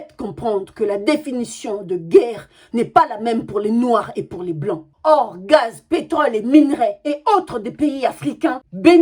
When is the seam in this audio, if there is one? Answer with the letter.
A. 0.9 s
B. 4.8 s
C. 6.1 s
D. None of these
D